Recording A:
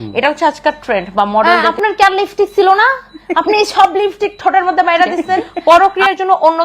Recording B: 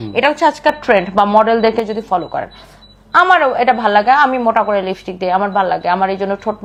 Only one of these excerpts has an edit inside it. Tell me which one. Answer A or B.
A